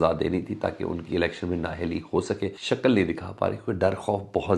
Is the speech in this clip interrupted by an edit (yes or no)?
yes